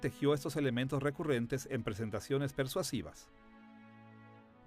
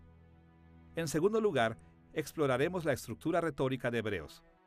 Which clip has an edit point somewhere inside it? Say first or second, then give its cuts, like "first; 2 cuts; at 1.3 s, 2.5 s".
first; 1 cut; at 1.0 s